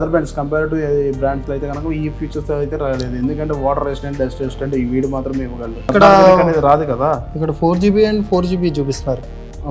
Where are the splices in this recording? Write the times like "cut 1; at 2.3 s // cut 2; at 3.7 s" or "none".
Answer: cut 1; at 5.9 s